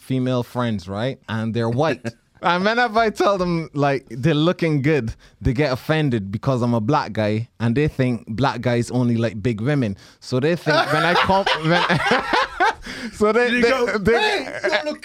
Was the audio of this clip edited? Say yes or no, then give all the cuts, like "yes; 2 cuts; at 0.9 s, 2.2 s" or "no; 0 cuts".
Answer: yes; 2 cuts; at 1.2 s, 2.2 s